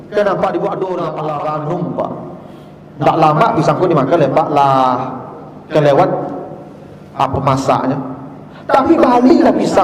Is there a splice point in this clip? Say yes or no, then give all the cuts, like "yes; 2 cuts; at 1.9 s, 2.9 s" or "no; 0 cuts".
yes; 1 cut; at 1.2 s